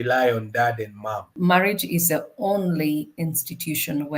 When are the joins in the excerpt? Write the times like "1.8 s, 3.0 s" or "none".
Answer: 1.4 s

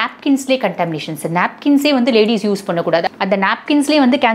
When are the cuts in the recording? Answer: 3.1 s

